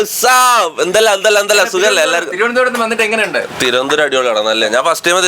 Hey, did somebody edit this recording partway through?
no; 0 cuts

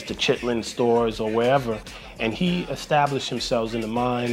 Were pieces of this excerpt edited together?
yes; 1 cut; at 2.4 s

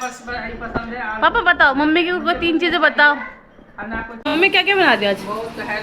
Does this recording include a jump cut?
yes; 1 cut; at 4.3 s

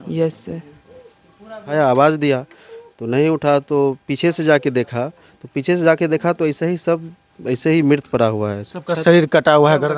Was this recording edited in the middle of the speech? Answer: yes; 1 cut; at 1.7 s

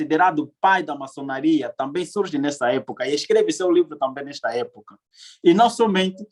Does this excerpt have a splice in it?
no; 0 cuts

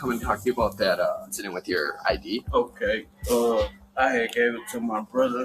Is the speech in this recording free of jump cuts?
no; 2 cuts; at 1.3 s, 2.5 s

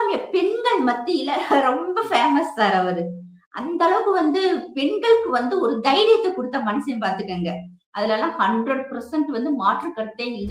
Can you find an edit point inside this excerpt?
no; 0 cuts

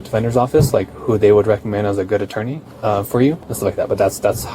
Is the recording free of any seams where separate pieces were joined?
no; 2 cuts; at 2.6 s, 3.5 s

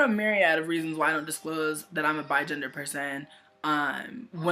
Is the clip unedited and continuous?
no; 1 cut; at 1.9 s

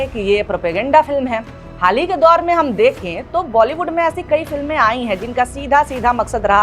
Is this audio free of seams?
yes; 0 cuts

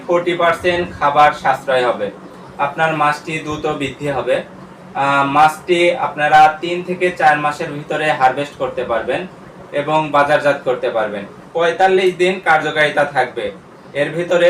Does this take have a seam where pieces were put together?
yes; 2 cuts; at 2.4 s, 11.4 s

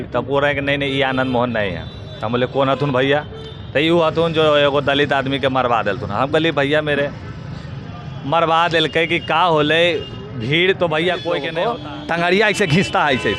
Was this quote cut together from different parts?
yes; 1 cut; at 11.5 s

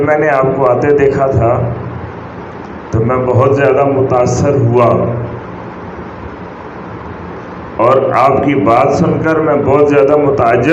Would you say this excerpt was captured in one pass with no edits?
yes; 0 cuts

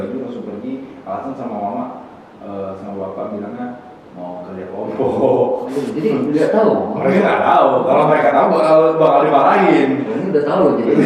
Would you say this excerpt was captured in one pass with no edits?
yes; 0 cuts

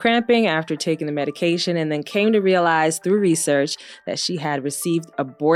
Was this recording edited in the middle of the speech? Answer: no; 0 cuts

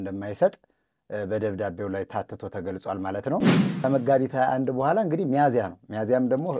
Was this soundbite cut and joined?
yes; 1 cut; at 3.6 s

